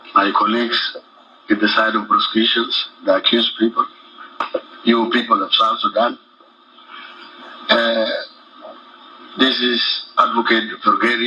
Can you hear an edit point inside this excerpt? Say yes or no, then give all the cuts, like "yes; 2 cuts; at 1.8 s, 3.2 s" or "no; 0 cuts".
no; 0 cuts